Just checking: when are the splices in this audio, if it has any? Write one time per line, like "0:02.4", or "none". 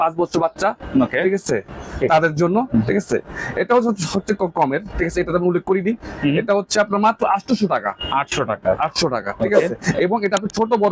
none